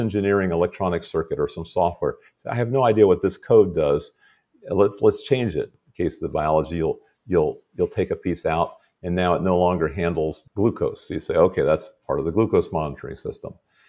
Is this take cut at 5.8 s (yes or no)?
yes